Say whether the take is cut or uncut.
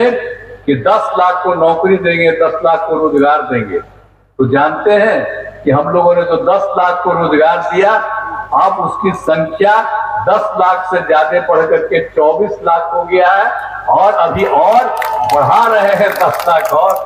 uncut